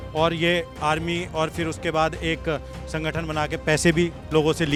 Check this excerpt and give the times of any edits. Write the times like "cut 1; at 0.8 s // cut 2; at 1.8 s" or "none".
none